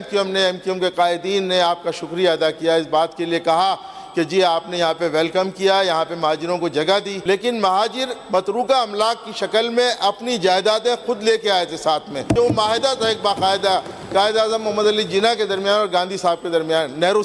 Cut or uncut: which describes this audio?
cut